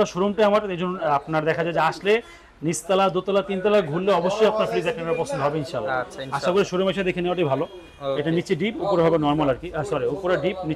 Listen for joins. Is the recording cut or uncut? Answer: uncut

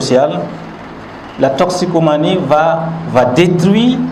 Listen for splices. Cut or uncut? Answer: uncut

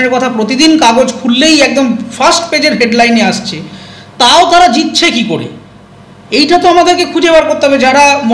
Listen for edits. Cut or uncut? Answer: uncut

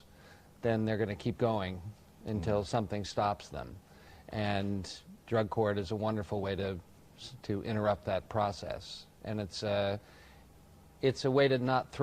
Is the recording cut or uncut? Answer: cut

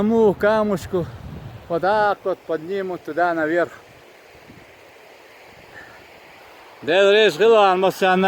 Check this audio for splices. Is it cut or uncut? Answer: uncut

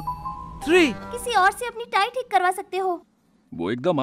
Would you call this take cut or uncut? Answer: cut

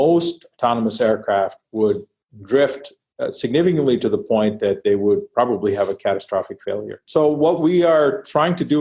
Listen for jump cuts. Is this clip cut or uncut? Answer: cut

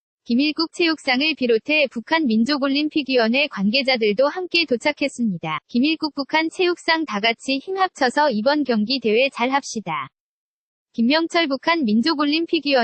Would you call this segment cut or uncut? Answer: uncut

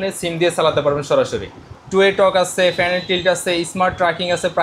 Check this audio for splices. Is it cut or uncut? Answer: cut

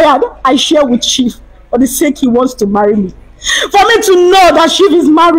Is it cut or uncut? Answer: uncut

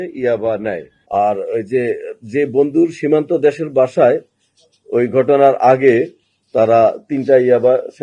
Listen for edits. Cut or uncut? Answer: cut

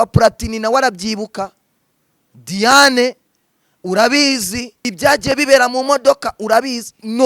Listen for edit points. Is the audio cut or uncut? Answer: cut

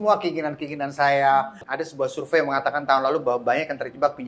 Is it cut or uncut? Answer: cut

